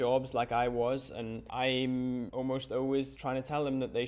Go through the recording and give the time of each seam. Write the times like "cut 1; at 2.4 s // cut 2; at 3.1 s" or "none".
cut 1; at 1.4 s // cut 2; at 2.3 s // cut 3; at 3.1 s